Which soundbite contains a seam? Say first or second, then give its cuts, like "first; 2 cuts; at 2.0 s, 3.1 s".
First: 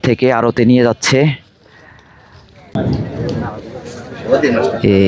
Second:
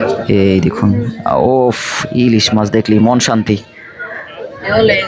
first; 1 cut; at 2.7 s